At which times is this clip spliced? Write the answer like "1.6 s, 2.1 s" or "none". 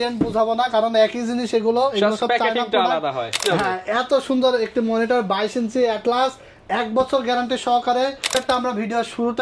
3.5 s, 8.4 s